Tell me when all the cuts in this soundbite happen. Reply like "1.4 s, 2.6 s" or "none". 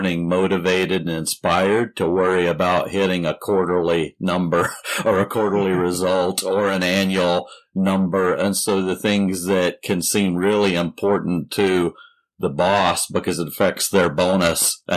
none